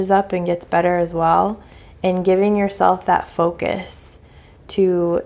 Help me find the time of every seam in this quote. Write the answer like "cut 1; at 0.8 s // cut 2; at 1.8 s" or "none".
none